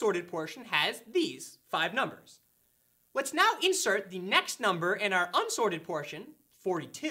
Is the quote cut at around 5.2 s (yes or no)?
no